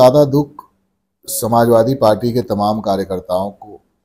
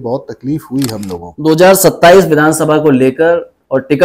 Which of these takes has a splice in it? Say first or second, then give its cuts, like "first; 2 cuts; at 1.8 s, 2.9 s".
second; 1 cut; at 1.3 s